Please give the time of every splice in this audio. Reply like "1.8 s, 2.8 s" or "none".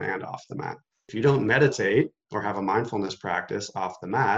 1.0 s